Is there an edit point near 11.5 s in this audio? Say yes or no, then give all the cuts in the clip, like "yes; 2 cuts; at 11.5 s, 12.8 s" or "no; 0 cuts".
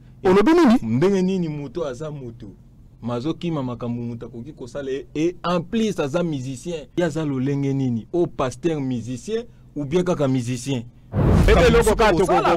yes; 2 cuts; at 6.8 s, 11.5 s